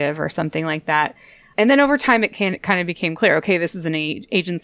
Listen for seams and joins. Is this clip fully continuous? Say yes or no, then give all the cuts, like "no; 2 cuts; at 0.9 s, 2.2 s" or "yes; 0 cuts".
yes; 0 cuts